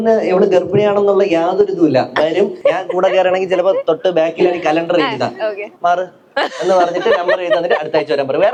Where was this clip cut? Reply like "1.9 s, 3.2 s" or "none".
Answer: none